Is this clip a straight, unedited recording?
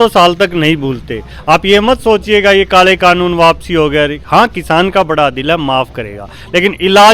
yes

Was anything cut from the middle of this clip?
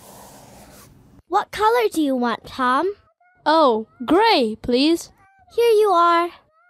yes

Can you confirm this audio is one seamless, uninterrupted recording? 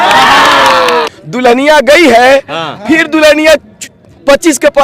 no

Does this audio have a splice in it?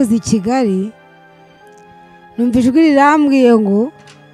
yes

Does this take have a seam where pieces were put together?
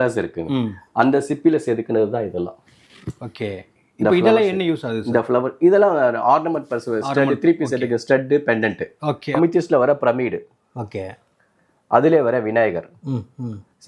yes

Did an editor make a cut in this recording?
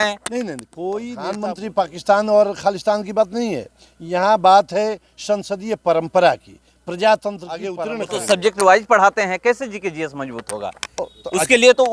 yes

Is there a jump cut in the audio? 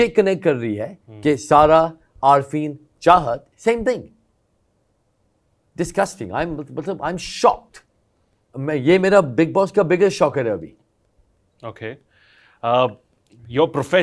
no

